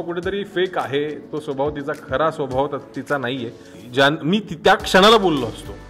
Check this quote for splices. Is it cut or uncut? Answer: cut